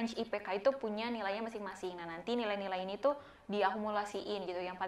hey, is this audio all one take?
yes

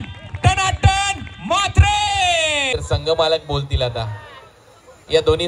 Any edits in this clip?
yes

